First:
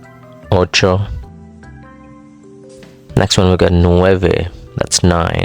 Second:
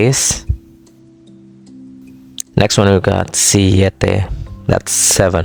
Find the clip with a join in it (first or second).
first